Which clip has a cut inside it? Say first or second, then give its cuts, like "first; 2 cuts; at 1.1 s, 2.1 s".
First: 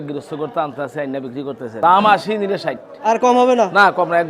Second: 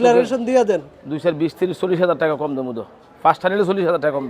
first; 1 cut; at 1.7 s